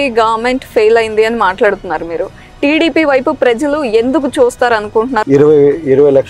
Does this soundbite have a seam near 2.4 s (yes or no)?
no